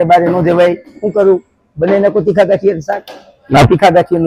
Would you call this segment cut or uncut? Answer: uncut